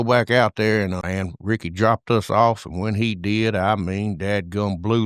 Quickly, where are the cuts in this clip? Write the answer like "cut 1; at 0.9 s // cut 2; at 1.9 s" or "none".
cut 1; at 1.0 s

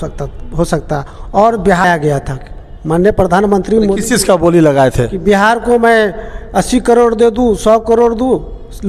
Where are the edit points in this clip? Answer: cut 1; at 1.8 s

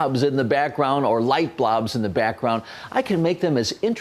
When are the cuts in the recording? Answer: none

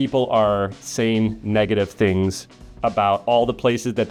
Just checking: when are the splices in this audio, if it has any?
none

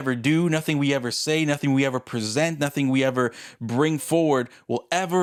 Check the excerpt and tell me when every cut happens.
none

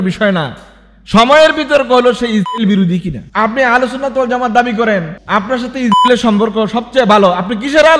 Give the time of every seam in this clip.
cut 1; at 3.2 s

